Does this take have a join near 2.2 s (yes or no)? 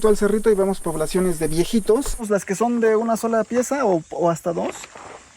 yes